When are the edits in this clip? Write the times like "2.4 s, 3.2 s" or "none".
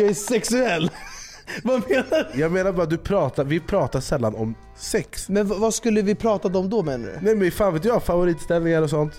2.3 s, 5.2 s